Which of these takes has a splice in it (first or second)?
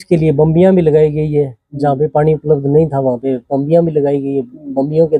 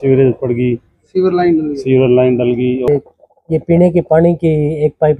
second